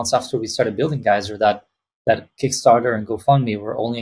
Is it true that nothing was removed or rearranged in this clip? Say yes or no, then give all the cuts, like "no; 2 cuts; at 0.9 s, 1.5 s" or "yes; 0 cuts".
yes; 0 cuts